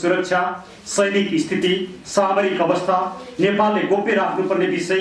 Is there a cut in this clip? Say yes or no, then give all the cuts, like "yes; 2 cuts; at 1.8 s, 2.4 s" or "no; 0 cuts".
no; 0 cuts